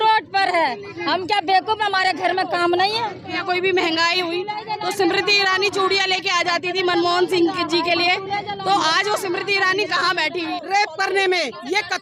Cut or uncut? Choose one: cut